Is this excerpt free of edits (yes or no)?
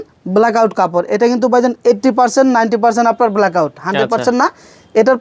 yes